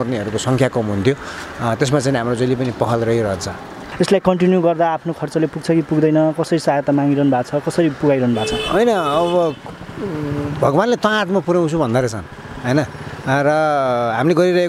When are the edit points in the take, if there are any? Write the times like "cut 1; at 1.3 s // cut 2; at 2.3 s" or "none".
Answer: none

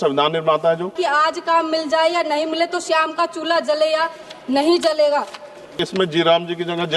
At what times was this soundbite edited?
cut 1; at 1.0 s // cut 2; at 5.8 s

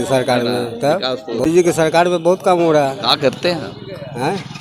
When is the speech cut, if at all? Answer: cut 1; at 1.5 s

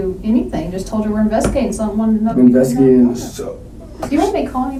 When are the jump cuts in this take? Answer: none

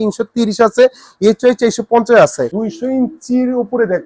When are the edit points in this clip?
cut 1; at 2.6 s

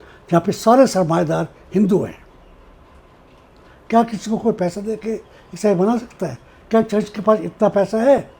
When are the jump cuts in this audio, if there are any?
none

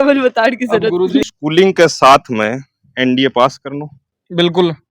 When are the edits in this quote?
cut 1; at 1.2 s

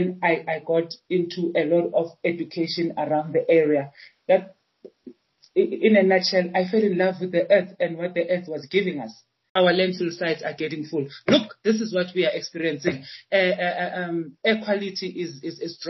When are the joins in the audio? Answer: cut 1; at 9.5 s

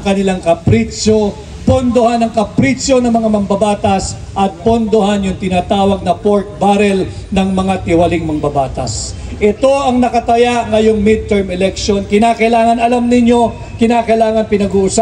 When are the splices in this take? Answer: none

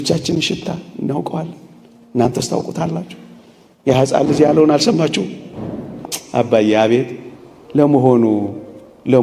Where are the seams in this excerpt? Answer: cut 1; at 6.0 s

